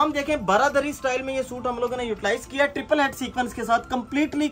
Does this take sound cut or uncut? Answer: uncut